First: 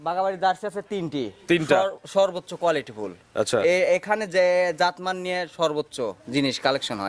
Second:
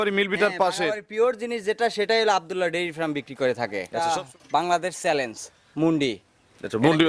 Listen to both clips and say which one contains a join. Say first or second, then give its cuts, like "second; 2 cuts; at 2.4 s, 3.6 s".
second; 1 cut; at 3.9 s